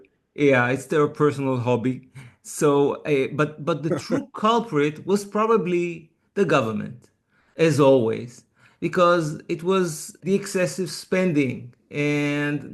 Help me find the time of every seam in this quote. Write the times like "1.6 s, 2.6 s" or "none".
10.2 s